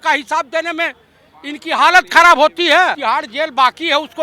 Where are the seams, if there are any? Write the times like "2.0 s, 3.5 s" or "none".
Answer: 3.0 s